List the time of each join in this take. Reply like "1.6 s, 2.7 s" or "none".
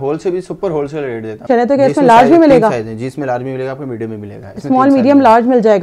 1.5 s